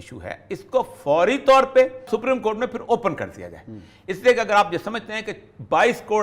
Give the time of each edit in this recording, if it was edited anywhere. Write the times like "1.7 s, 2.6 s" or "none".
2.1 s

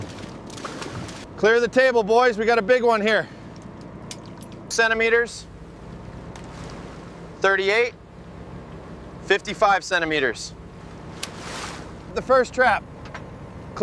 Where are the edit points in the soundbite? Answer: 4.7 s, 12.0 s

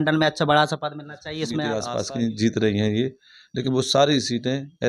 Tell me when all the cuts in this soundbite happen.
1.8 s

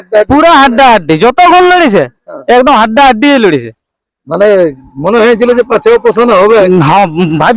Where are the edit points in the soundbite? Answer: none

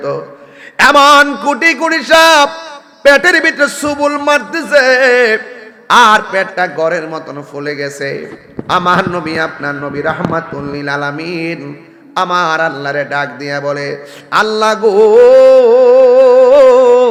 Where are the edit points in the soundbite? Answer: none

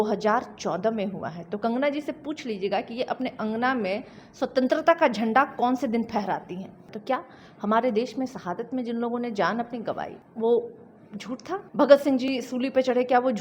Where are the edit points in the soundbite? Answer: 6.9 s, 10.2 s, 11.7 s

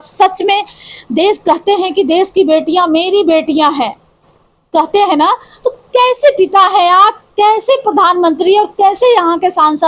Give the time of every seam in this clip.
none

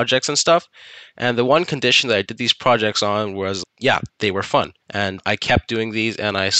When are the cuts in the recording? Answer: 3.7 s, 4.8 s

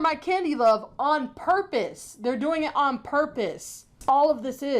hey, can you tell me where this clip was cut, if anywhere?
3.9 s

